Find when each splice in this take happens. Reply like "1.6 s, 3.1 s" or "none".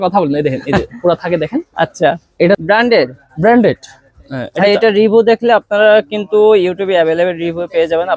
2.6 s